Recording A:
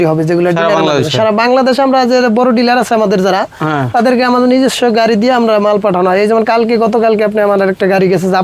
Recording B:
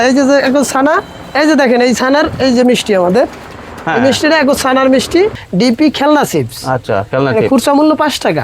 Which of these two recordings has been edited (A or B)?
B